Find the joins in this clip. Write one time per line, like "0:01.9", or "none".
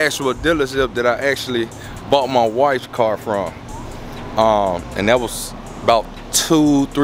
none